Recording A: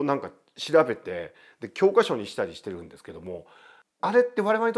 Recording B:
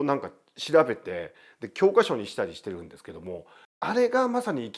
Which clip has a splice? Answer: B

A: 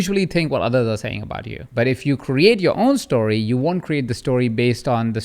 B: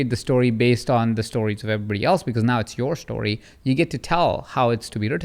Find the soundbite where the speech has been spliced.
A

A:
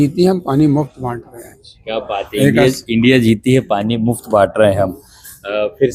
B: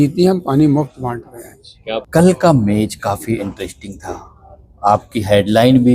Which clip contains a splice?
B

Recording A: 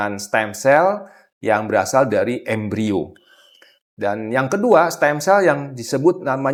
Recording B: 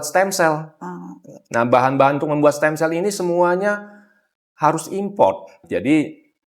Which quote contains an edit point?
B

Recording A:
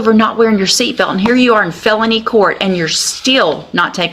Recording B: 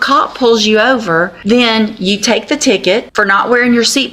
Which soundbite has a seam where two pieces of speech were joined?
B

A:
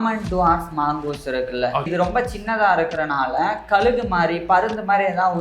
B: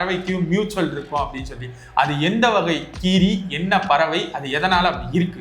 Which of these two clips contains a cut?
A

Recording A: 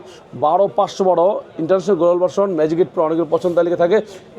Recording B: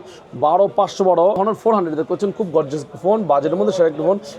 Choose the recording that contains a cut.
B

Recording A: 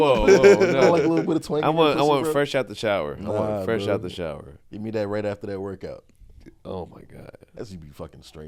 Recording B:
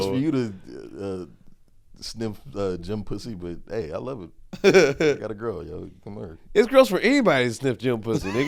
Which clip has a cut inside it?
A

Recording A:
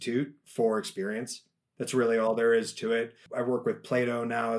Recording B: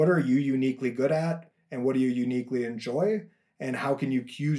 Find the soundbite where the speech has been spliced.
A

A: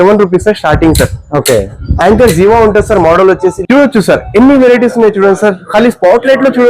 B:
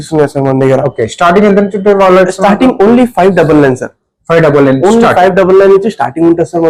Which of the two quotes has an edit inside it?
A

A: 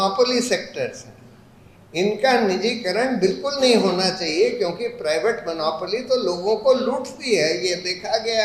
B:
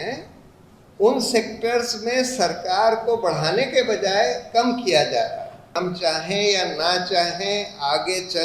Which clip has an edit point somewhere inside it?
B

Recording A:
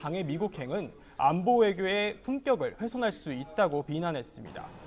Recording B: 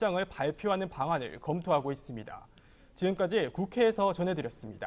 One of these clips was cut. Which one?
A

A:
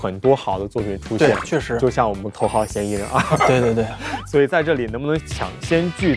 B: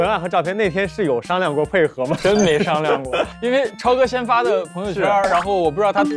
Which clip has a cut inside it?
A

